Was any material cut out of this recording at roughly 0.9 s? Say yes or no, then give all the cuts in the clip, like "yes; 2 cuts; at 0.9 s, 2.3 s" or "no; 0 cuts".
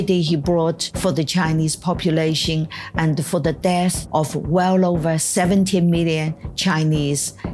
yes; 2 cuts; at 0.9 s, 4.0 s